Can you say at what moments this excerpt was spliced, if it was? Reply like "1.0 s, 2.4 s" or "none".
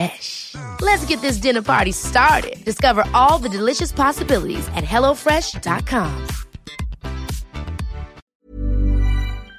8.3 s